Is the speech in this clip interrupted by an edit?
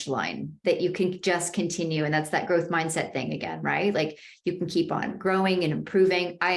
no; 0 cuts

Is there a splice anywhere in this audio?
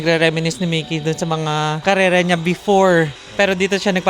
yes; 2 cuts; at 1.8 s, 3.2 s

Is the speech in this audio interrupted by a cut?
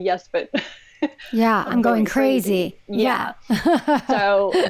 no; 0 cuts

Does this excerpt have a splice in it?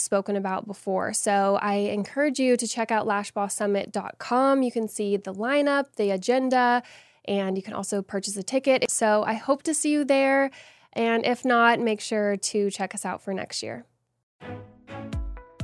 yes; 1 cut; at 8.9 s

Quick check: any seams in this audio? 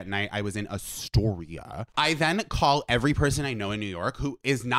yes; 1 cut; at 1.8 s

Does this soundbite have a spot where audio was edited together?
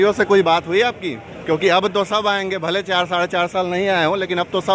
no; 0 cuts

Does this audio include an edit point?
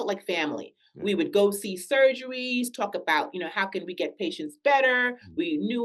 no; 0 cuts

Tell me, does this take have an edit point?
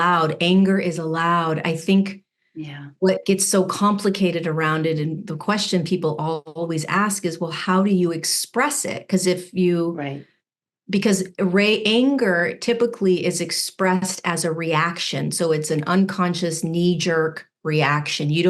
no; 0 cuts

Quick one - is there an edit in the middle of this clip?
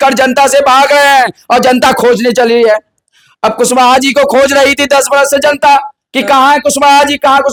no; 0 cuts

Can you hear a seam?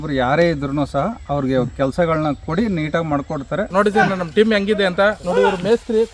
yes; 1 cut; at 3.7 s

